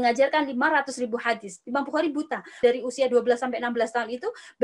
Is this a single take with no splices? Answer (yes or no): no